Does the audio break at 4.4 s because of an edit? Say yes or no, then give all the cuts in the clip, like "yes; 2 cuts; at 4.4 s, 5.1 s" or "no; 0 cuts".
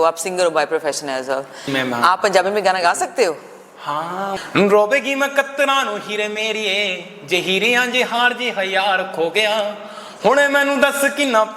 yes; 2 cuts; at 1.6 s, 4.4 s